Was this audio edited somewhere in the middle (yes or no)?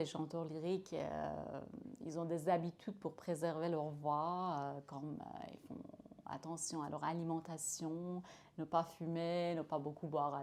no